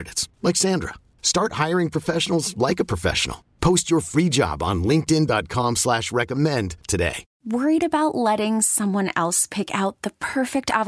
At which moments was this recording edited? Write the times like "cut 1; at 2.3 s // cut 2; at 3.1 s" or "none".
cut 1; at 7.3 s